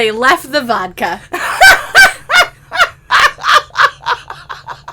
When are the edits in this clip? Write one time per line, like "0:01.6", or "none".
0:03.0